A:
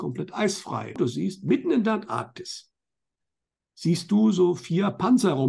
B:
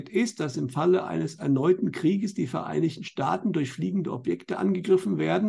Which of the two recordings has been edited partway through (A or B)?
A